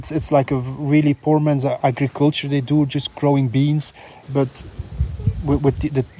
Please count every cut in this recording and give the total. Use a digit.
2